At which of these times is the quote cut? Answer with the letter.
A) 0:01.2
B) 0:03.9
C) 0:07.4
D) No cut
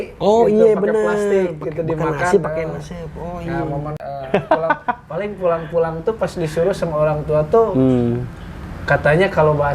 B